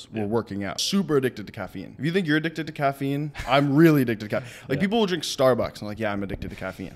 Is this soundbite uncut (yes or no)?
no